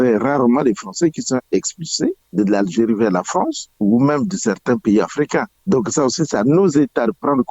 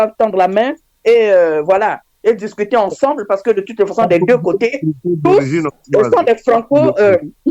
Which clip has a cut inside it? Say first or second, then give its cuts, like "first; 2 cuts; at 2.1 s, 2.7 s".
first; 3 cuts; at 2.2 s, 3.6 s, 5.5 s